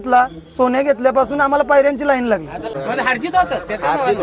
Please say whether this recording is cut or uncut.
cut